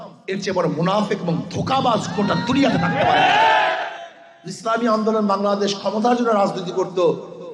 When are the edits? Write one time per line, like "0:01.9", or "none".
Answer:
0:03.8